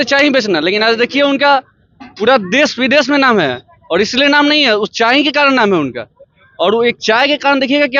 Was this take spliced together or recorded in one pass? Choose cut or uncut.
uncut